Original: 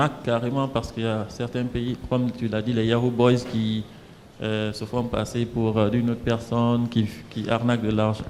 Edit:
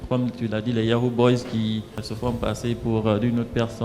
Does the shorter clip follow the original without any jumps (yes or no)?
no